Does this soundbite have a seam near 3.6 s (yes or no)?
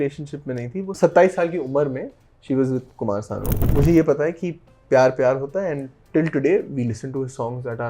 yes